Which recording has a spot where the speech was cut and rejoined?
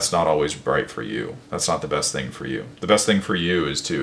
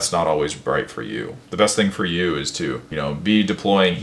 second; 2 cuts; at 1.4 s, 2.9 s

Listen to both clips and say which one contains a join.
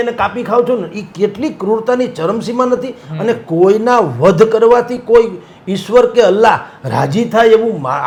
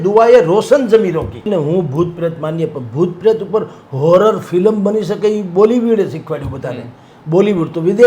second; 1 cut; at 1.5 s

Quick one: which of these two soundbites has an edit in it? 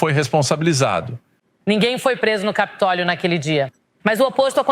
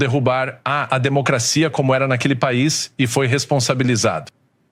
first; 1 cut; at 1.5 s

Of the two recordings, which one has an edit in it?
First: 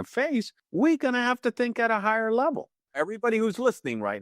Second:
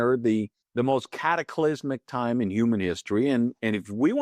first; 1 cut; at 2.8 s

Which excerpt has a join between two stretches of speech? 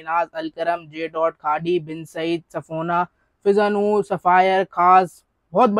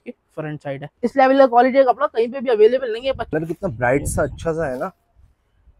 second; 2 cuts; at 0.9 s, 3.3 s

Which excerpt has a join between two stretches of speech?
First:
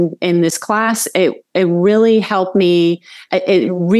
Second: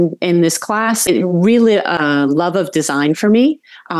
second; 2 cuts; at 1.1 s, 2.0 s

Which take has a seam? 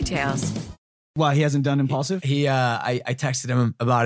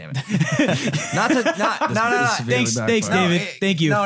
first; 1 cut; at 1.1 s

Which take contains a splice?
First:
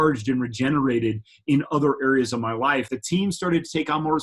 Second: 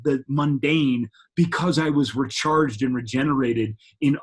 first; 1 cut; at 2.9 s

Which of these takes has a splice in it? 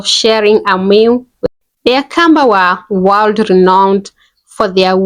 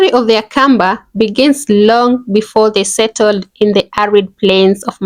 first; 1 cut; at 1.3 s

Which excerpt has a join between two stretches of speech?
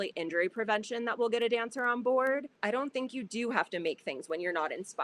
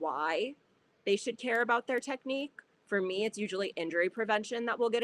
first; 1 cut; at 2.5 s

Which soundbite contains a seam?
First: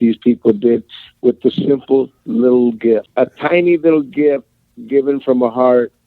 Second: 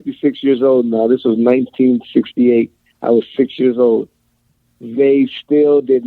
first; 1 cut; at 3.1 s

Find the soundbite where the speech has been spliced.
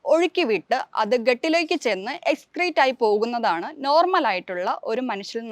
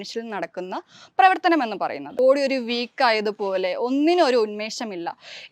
second; 1 cut; at 2.0 s

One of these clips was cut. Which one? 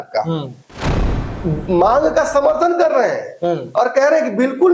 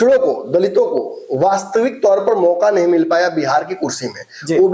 first; 1 cut; at 1.0 s

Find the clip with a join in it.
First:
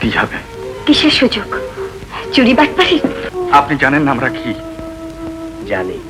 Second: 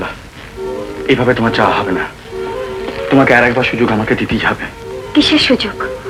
first; 1 cut; at 3.2 s

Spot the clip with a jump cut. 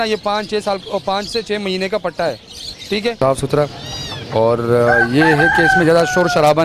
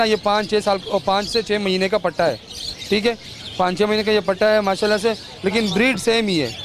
first; 1 cut; at 3.2 s

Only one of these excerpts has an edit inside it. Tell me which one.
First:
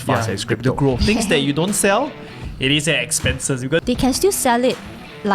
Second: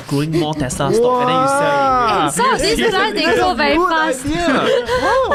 first; 2 cuts; at 1.0 s, 3.8 s

